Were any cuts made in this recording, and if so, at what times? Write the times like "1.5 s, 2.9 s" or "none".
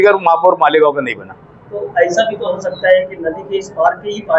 none